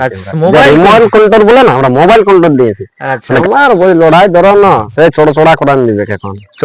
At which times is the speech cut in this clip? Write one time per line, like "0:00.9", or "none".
0:03.4